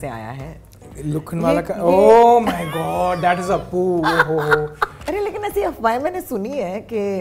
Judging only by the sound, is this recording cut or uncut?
cut